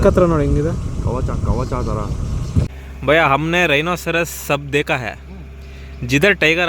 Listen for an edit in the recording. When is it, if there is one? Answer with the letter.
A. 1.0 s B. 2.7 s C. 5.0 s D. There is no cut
B